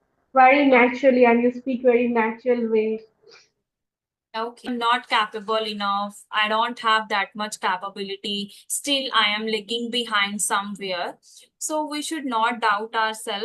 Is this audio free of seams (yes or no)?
no